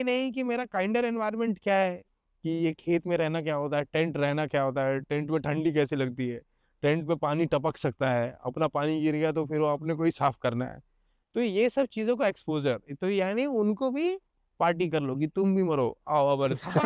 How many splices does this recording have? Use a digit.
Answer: 1